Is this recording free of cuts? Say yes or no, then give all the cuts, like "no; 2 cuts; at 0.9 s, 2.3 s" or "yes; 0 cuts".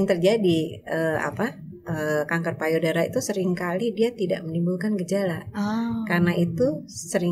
yes; 0 cuts